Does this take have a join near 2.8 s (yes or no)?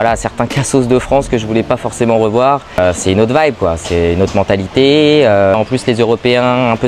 yes